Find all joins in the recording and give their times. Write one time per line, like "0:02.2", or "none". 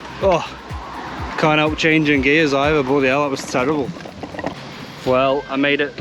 0:04.6